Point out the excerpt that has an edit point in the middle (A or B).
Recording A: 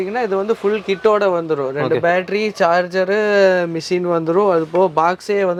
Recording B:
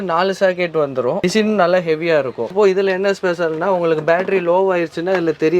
B